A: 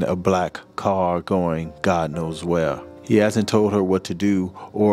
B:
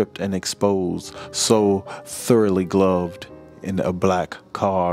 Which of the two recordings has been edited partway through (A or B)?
A